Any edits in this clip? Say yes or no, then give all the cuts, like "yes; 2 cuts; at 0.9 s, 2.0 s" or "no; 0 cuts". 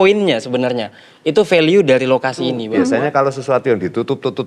yes; 1 cut; at 2.7 s